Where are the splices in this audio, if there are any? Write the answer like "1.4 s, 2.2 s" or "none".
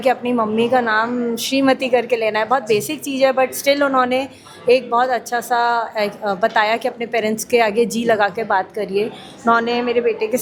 none